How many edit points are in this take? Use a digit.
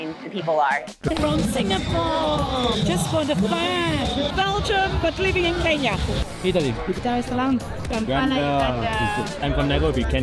1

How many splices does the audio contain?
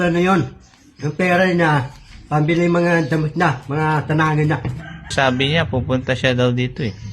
1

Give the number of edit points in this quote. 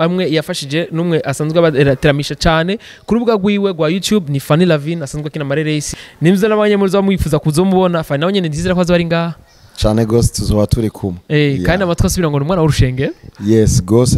1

